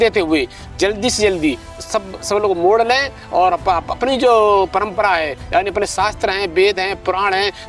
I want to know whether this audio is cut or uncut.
uncut